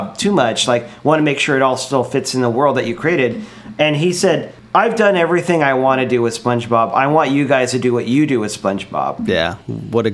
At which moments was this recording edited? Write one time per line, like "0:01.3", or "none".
none